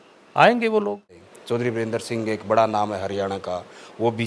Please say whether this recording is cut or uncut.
cut